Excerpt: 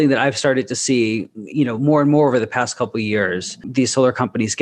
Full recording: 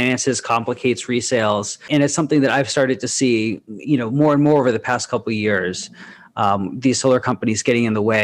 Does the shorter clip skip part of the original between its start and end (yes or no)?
yes